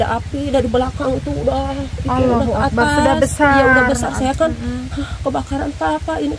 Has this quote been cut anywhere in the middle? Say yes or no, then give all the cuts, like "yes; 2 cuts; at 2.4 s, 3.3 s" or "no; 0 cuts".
no; 0 cuts